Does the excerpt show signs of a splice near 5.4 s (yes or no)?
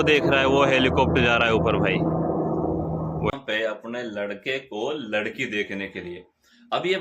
no